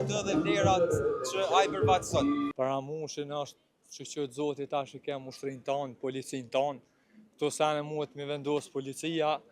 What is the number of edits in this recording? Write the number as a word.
one